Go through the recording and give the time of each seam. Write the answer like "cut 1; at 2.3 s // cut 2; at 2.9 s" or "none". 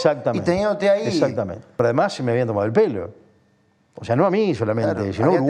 cut 1; at 1.6 s